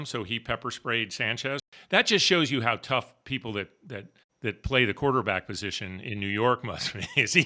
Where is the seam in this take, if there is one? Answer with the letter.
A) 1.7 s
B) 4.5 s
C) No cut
A